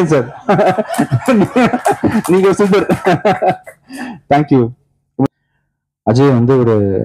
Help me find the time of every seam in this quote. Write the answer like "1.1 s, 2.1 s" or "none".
5.3 s